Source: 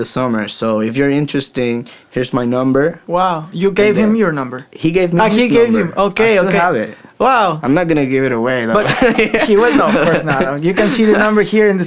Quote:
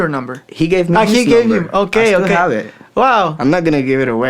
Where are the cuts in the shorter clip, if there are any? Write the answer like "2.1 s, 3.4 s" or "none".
none

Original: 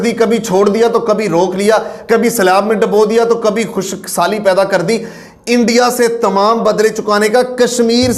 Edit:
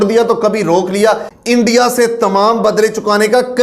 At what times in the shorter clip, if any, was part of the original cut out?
1.3 s

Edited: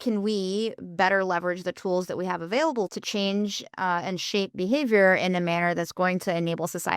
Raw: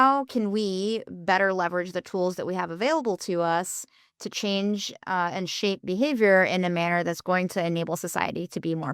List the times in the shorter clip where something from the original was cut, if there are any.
2.9 s

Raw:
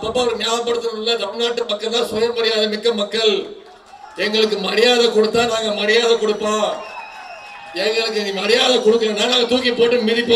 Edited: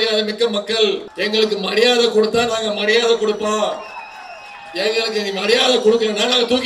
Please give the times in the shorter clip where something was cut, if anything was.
1.1 s

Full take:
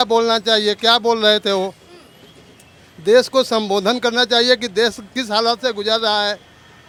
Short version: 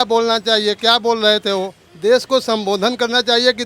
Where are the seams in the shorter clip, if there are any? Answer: 1.8 s

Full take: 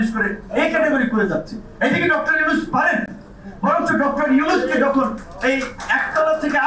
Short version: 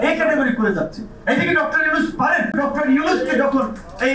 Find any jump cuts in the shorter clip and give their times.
2.5 s

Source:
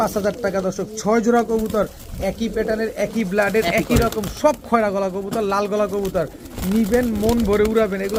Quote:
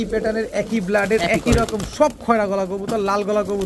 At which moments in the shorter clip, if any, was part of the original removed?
none

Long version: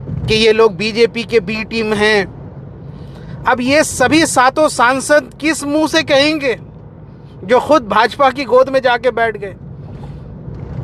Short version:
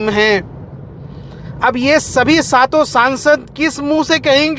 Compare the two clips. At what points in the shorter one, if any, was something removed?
none

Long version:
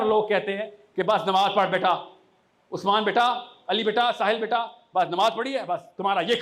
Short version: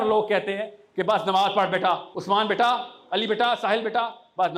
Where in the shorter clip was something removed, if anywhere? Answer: 2.1 s

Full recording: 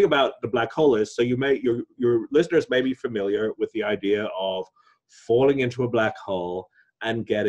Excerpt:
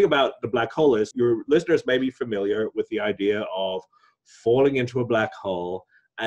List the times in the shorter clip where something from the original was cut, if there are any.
1.1 s

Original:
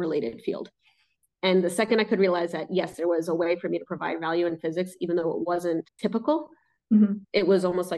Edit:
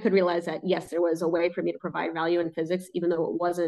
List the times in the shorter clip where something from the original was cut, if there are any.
none

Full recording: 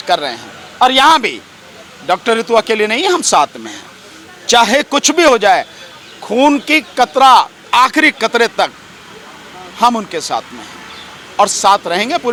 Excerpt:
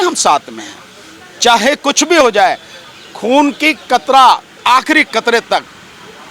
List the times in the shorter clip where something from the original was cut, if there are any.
none

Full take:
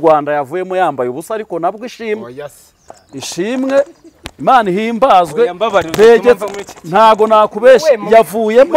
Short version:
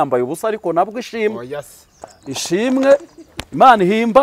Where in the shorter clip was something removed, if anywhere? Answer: none

